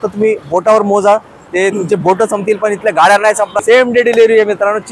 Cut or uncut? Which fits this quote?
cut